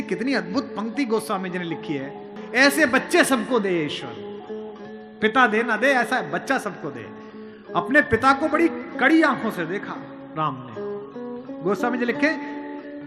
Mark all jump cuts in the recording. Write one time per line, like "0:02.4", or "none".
0:02.3